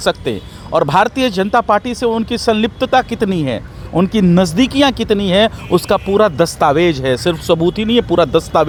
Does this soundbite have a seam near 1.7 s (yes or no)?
no